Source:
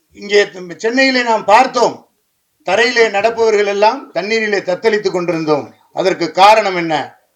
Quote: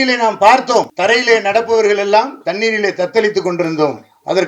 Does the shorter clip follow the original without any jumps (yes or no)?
no